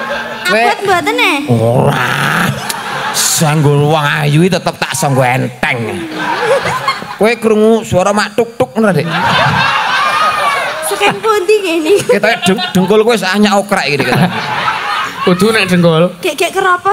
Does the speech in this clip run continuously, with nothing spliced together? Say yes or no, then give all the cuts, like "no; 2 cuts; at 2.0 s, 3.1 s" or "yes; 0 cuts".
yes; 0 cuts